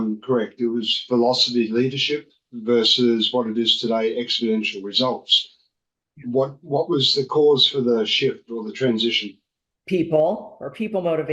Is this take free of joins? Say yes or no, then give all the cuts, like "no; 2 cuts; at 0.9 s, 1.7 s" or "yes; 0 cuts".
no; 1 cut; at 9.7 s